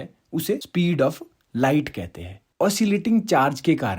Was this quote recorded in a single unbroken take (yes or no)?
no